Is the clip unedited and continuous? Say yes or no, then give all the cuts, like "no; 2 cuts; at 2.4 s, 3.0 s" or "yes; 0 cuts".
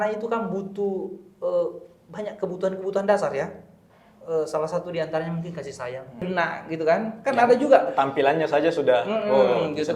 no; 1 cut; at 6.2 s